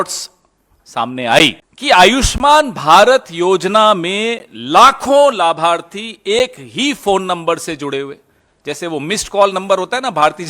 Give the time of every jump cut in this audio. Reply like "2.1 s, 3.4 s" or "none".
1.7 s